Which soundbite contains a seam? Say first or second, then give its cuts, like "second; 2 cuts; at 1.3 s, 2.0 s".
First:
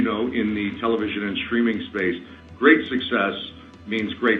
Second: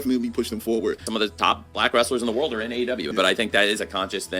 second; 2 cuts; at 1.1 s, 3.1 s